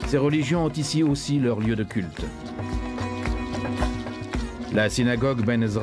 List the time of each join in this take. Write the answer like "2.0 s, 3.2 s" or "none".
3.3 s